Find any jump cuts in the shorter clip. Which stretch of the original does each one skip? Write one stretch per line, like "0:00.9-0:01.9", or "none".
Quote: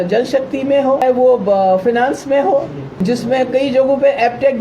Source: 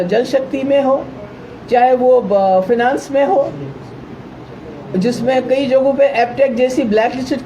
0:01.0-0:01.9
0:03.7-0:04.8